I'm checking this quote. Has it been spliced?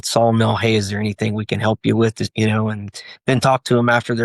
yes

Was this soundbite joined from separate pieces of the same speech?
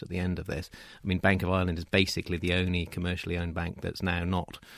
no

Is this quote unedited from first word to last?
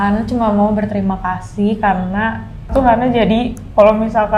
no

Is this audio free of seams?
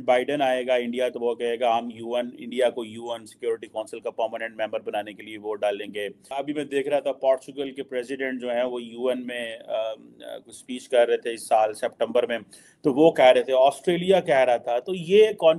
no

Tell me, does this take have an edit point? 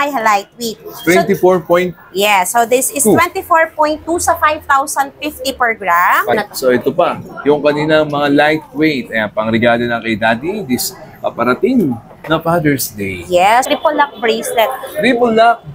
yes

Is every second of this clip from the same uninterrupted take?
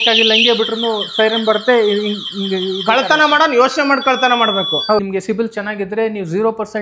no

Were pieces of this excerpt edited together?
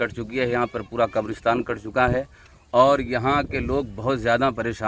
no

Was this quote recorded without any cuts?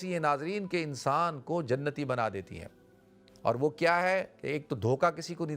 yes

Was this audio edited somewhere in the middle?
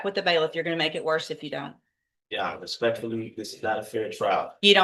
no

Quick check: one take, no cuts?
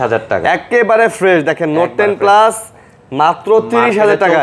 yes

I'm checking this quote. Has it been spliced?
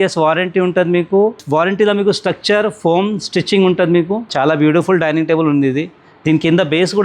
yes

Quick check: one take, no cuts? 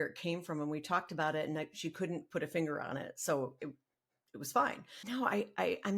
no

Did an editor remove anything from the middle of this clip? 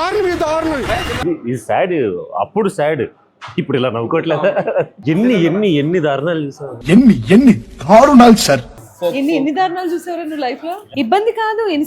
yes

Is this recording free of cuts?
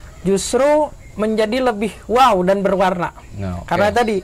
yes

